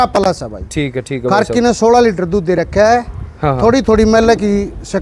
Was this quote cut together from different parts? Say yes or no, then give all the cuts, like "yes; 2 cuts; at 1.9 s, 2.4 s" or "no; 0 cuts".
no; 0 cuts